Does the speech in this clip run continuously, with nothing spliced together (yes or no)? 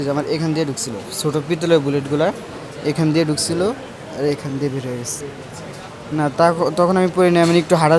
yes